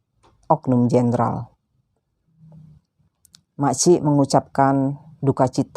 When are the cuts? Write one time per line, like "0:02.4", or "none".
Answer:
0:02.4

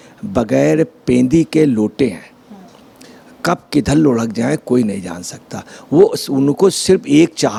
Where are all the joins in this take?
none

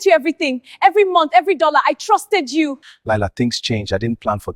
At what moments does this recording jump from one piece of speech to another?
0:02.9

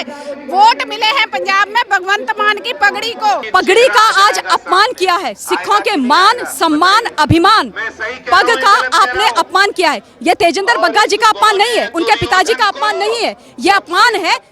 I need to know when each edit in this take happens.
0:03.4

